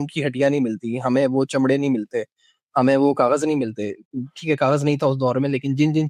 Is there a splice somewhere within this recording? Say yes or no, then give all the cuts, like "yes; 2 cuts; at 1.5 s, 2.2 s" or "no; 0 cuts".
no; 0 cuts